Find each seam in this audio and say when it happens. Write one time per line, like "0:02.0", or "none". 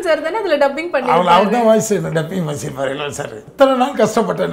0:03.4